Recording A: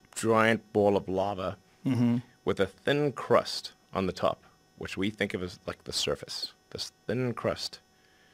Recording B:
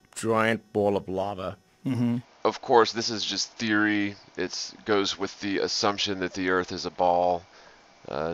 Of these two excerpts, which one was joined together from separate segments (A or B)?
A